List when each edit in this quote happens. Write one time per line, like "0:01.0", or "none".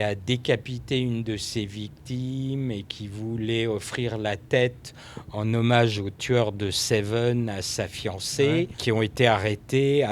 0:08.8